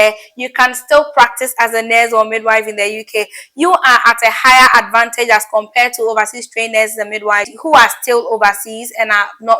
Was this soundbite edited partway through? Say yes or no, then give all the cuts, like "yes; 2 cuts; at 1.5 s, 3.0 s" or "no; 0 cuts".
yes; 1 cut; at 7.5 s